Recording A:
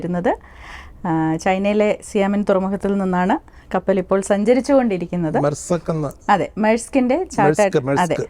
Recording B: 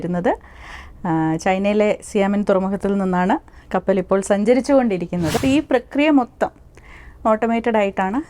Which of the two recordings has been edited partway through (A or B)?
B